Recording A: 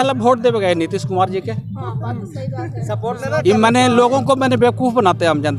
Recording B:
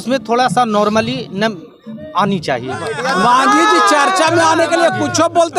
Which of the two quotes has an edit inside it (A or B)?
B